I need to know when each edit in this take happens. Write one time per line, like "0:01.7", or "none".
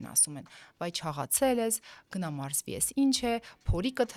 none

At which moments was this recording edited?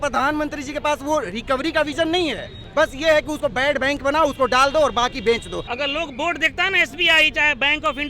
0:05.6

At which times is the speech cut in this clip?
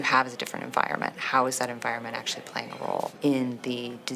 0:03.1

